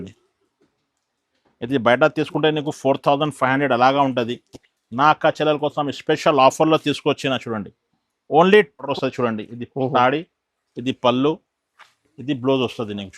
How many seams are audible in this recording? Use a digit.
1